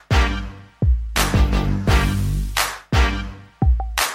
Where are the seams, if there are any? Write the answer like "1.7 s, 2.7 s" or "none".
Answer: none